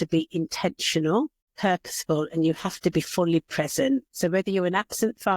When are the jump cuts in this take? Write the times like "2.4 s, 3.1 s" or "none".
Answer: 1.4 s, 4.1 s